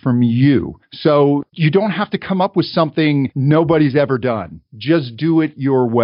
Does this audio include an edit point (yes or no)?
yes